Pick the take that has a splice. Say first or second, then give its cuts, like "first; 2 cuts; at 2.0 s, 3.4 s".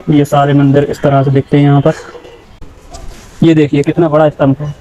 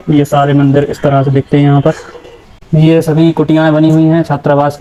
first; 1 cut; at 2.6 s